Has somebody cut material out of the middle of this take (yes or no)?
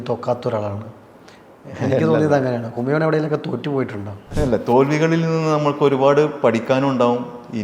yes